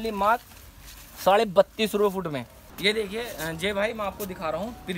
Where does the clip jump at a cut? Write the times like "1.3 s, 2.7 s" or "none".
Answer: none

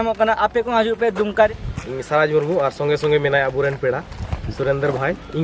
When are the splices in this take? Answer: 1.5 s

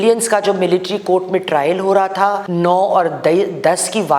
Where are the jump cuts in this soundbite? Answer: 2.4 s

